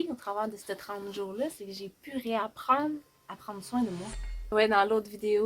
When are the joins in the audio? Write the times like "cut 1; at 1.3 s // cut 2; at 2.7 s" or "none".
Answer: cut 1; at 4.5 s